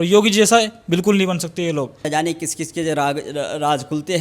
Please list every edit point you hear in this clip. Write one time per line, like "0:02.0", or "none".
0:02.1